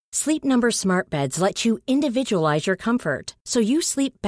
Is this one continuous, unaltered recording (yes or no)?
yes